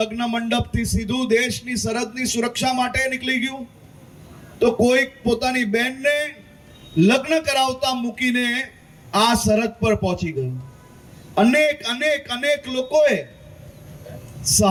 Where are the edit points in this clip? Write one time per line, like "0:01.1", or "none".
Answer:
none